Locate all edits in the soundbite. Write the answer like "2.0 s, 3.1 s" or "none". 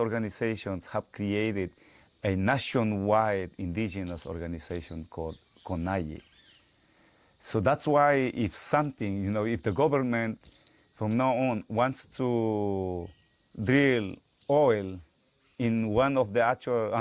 none